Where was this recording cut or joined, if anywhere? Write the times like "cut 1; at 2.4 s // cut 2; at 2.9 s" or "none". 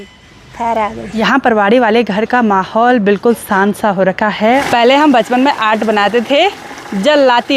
cut 1; at 1.1 s // cut 2; at 4.6 s